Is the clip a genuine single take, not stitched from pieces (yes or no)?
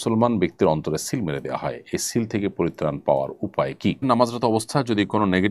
no